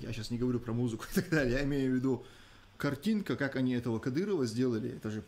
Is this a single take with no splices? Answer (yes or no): yes